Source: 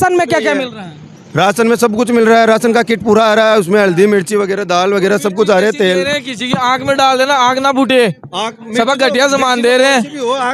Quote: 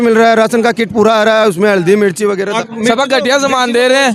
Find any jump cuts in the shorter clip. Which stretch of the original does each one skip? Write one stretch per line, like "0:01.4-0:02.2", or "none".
0:04.6-0:08.4